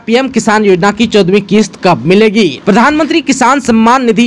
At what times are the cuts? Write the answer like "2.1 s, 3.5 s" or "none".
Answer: 2.6 s

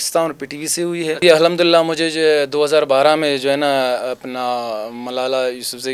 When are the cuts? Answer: 1.2 s

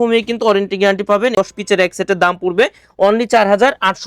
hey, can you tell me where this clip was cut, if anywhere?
1.4 s

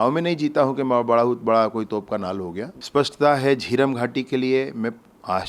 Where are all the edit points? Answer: 2.7 s

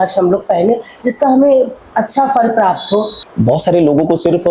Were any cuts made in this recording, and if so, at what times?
3.2 s

